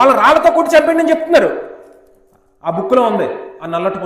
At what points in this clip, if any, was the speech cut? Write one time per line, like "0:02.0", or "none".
none